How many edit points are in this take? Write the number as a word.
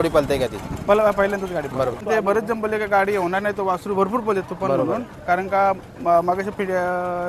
one